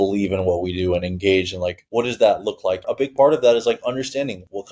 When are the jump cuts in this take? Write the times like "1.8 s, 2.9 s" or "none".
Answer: 2.9 s